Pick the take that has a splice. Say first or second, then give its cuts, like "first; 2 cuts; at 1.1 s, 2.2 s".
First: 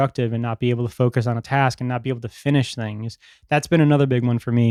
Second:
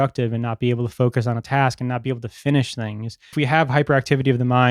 second; 1 cut; at 3.3 s